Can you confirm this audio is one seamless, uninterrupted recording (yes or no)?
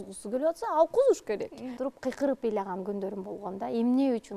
no